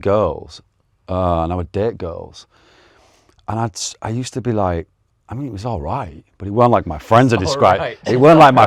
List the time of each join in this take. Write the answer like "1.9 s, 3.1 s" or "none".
none